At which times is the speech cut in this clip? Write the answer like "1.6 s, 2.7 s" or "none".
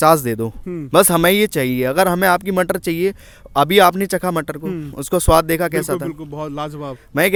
none